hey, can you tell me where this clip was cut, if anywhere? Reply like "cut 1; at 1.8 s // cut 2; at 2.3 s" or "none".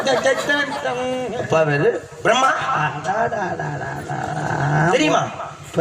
cut 1; at 1.2 s